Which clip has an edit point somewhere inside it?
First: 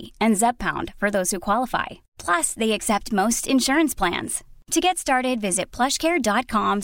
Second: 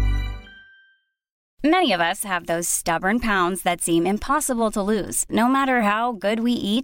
second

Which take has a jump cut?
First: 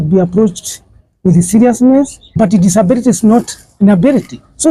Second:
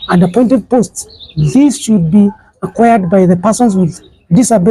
first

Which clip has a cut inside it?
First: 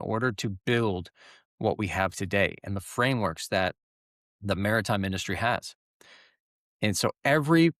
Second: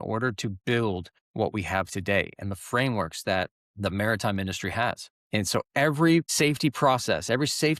second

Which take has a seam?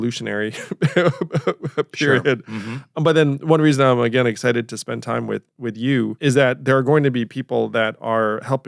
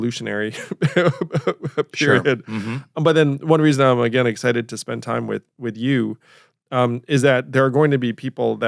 first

